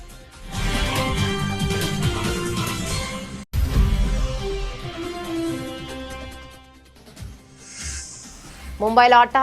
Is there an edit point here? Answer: yes; 1 cut; at 8.3 s

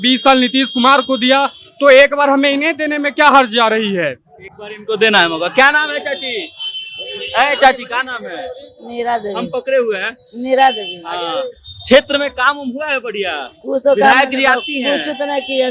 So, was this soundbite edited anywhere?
no; 0 cuts

